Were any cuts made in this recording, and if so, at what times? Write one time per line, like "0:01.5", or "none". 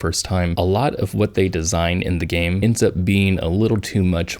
0:02.6